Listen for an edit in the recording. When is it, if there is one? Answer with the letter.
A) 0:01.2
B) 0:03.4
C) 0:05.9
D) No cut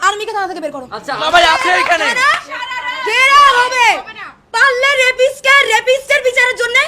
A